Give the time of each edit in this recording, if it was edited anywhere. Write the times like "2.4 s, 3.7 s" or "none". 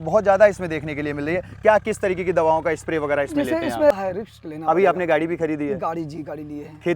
3.9 s